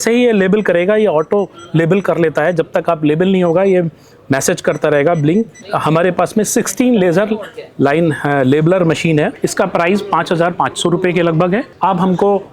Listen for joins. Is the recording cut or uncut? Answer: cut